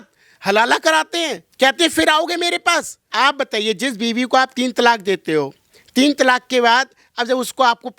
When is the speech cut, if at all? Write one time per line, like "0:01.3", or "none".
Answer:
0:03.1